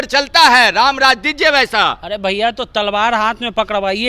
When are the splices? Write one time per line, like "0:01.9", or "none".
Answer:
none